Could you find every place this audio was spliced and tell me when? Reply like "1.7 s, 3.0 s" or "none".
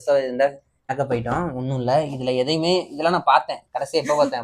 0.9 s